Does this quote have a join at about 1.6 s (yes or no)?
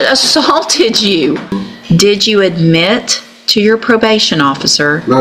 yes